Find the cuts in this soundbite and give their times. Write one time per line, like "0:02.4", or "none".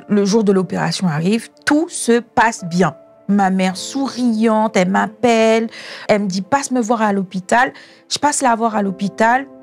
0:03.1
0:06.0